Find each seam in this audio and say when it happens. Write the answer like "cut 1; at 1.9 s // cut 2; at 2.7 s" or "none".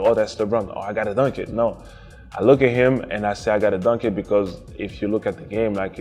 none